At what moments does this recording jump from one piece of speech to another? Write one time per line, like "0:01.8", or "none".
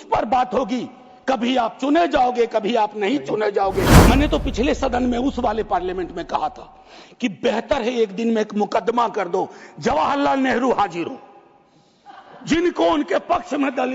0:03.9